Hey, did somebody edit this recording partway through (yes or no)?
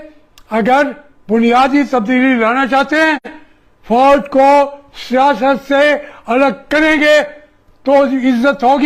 no